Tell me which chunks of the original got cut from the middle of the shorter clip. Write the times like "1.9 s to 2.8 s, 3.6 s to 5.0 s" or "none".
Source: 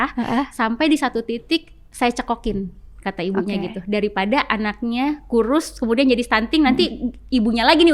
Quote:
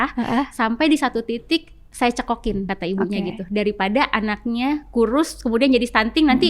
2.7 s to 3.1 s